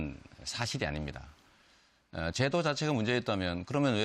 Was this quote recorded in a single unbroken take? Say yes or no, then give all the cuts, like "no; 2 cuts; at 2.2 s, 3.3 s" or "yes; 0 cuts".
yes; 0 cuts